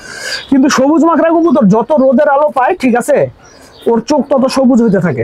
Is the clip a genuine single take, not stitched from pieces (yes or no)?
yes